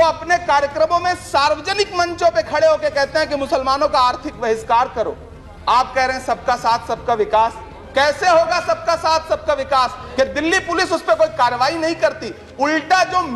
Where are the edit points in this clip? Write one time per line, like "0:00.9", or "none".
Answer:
0:10.0

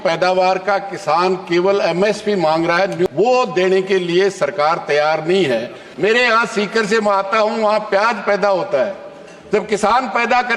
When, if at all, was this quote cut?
0:03.1
0:05.8

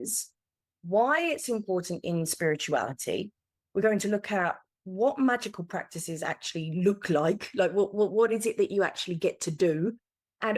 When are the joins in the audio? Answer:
none

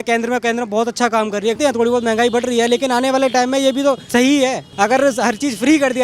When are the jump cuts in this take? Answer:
0:01.6
0:04.2

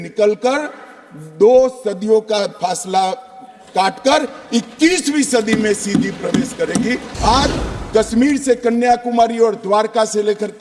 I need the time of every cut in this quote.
0:07.0

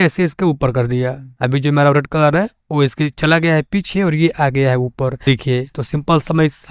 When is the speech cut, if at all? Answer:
0:01.2
0:05.2

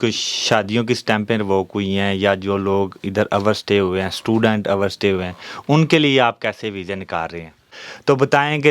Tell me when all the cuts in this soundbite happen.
0:07.7

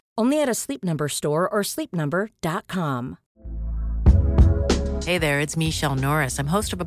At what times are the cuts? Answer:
0:03.2

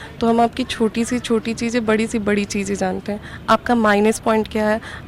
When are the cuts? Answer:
none

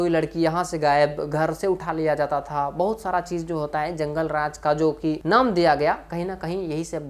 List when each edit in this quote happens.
none

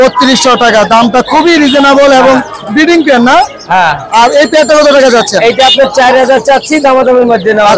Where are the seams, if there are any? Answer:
none

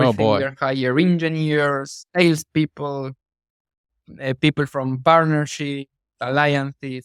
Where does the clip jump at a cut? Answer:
none

